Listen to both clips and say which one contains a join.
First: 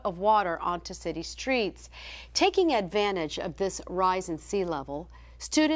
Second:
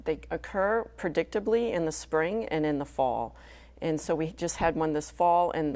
first; 1 cut; at 2.9 s

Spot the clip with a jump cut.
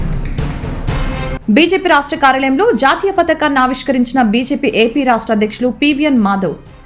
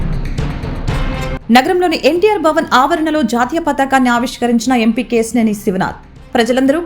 first; 1 cut; at 1.2 s

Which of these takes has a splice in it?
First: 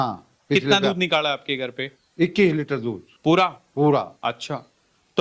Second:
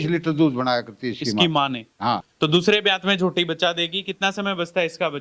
second; 1 cut; at 2.3 s

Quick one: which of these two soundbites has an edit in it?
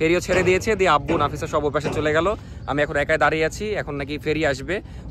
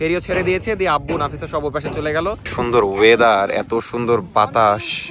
second; 1 cut; at 2.5 s

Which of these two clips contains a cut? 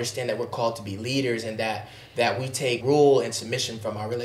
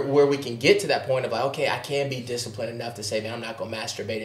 first; 1 cut; at 2.8 s

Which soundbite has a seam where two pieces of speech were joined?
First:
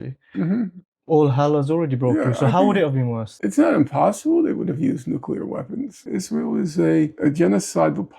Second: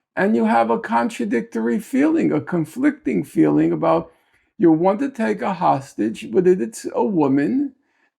first; 3 cuts; at 3.2 s, 6.0 s, 7.1 s

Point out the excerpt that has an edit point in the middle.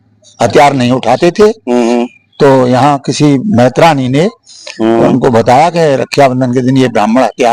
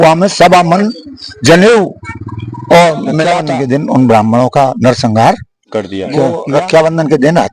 second; 2 cuts; at 3.4 s, 6.4 s

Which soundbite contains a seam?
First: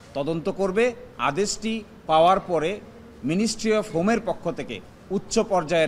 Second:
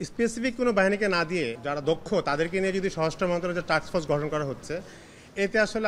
second; 1 cut; at 1.5 s

